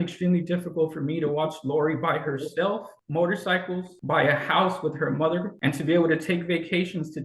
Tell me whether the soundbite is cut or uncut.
cut